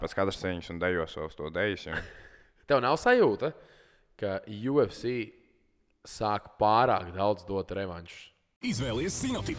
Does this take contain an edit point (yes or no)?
no